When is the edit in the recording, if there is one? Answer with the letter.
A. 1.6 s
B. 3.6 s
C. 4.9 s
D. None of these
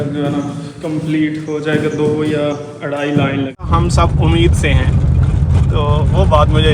B